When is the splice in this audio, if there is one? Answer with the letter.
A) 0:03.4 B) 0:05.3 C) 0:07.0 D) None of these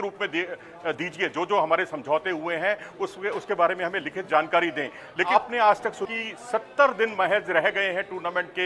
B